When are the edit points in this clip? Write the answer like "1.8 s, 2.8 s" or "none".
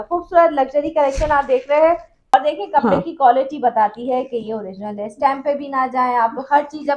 2.3 s